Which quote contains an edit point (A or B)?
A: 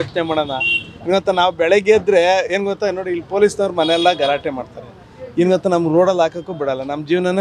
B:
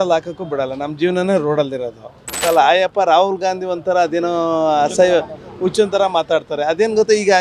B